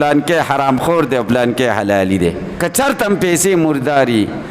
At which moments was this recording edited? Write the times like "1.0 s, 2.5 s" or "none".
2.6 s